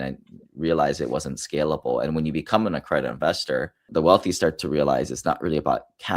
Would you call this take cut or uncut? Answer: cut